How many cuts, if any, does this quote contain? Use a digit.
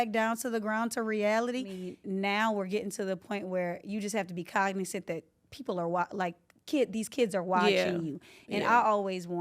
1